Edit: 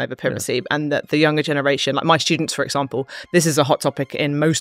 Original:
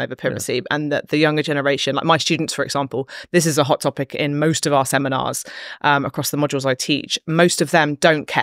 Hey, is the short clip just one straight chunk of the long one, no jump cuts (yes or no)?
yes